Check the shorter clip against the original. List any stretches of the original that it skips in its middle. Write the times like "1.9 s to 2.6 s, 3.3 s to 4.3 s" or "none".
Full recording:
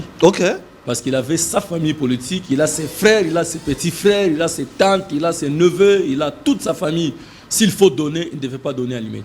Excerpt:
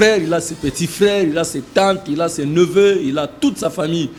none